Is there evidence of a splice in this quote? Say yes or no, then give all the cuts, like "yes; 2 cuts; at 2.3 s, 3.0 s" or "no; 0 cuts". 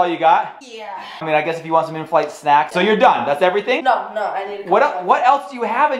yes; 3 cuts; at 1.1 s, 2.7 s, 3.8 s